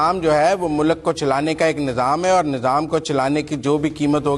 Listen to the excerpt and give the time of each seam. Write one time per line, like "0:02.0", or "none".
none